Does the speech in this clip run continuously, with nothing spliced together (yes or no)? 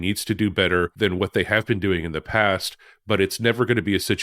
no